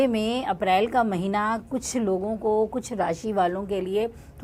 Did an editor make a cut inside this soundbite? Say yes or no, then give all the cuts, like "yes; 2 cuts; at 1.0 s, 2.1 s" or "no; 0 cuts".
no; 0 cuts